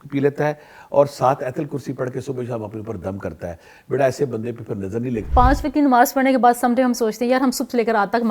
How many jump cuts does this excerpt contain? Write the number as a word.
one